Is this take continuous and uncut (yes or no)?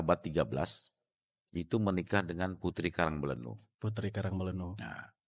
yes